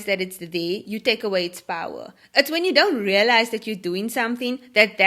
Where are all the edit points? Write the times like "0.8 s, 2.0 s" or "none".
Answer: none